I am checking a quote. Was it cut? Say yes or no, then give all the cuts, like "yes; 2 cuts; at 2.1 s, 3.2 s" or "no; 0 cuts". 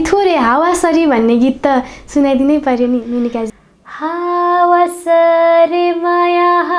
yes; 1 cut; at 3.5 s